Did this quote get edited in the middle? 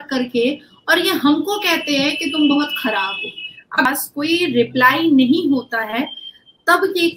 yes; 1 cut; at 3.9 s

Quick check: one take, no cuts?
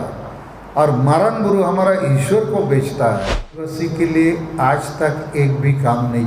no; 1 cut; at 3.8 s

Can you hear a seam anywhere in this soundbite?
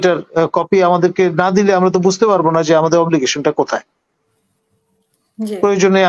no; 0 cuts

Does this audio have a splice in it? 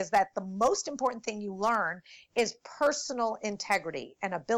no; 0 cuts

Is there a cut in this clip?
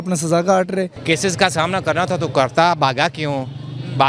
yes; 1 cut; at 1.0 s

